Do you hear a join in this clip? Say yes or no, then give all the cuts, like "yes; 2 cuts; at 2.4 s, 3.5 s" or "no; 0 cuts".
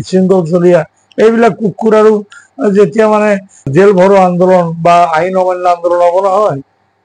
yes; 1 cut; at 3.7 s